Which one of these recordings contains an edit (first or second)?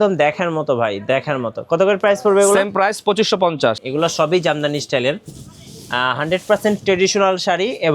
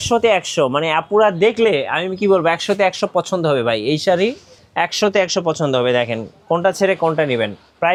first